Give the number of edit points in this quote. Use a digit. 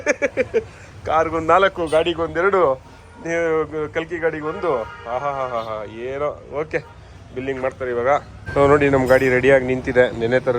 1